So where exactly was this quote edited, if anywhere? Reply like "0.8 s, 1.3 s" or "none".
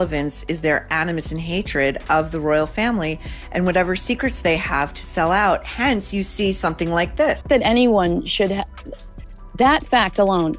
7.4 s